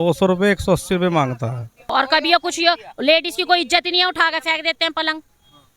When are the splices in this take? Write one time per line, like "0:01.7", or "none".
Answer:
0:01.9